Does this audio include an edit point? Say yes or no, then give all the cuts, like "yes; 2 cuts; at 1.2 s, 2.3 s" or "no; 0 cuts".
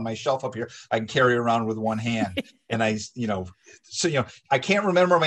no; 0 cuts